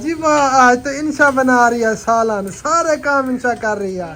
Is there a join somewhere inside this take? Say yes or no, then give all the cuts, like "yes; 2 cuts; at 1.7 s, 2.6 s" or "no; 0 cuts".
no; 0 cuts